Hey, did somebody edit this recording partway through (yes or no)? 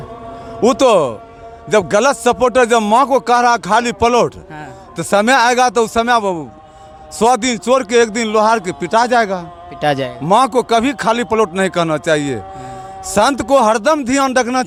no